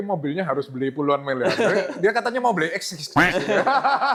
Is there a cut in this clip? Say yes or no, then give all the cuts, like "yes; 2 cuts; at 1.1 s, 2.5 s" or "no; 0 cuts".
no; 0 cuts